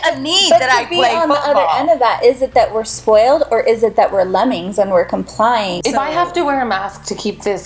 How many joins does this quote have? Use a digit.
1